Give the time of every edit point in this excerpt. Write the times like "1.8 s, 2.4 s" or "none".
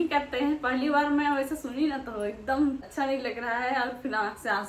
2.9 s